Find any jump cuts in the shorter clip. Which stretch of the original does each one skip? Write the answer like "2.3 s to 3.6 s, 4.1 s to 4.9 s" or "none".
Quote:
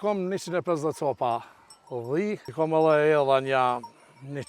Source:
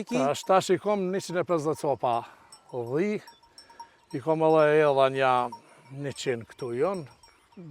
3.3 s to 4.2 s